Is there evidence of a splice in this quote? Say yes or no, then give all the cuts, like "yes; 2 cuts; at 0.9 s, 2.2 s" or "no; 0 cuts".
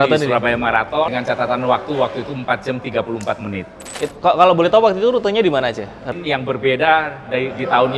yes; 3 cuts; at 1.1 s, 3.9 s, 6.1 s